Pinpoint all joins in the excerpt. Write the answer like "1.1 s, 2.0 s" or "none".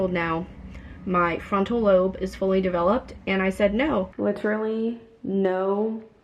4.1 s

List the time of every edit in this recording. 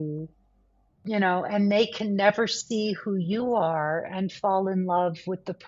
1.0 s

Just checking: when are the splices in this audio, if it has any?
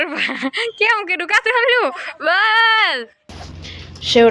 3.3 s

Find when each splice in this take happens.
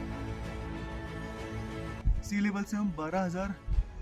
2.0 s

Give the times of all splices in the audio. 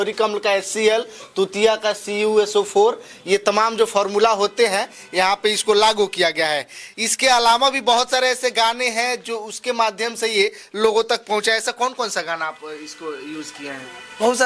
none

